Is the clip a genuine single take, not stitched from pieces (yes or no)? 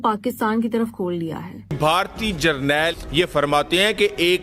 no